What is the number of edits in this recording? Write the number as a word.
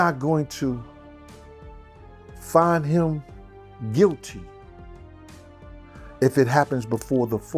zero